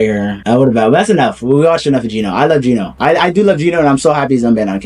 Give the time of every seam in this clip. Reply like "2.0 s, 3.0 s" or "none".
none